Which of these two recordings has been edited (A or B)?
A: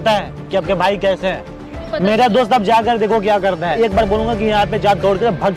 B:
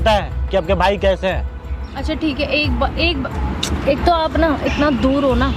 A